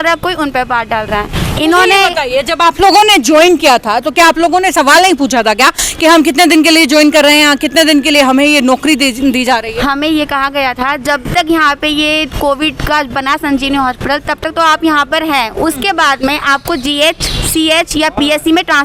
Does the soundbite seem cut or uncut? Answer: uncut